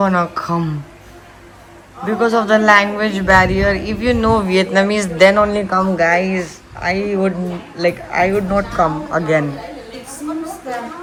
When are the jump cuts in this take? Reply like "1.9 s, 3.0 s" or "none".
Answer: none